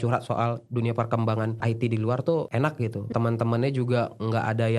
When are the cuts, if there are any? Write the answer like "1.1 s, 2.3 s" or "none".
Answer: 3.1 s